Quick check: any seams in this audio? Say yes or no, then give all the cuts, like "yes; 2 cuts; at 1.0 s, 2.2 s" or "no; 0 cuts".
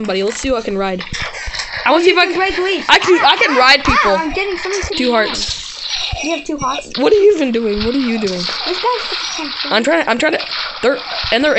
no; 0 cuts